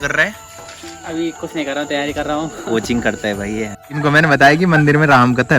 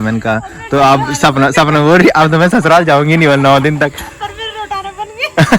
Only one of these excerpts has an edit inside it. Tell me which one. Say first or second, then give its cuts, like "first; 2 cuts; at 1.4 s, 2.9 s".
first; 1 cut; at 3.9 s